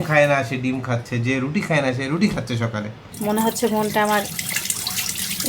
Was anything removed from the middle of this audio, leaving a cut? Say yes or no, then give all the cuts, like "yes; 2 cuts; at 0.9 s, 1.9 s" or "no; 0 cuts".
yes; 1 cut; at 3.0 s